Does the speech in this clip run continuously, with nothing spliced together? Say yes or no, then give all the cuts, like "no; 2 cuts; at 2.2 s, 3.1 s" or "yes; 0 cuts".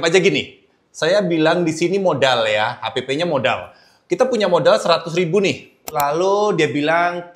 no; 1 cut; at 5.9 s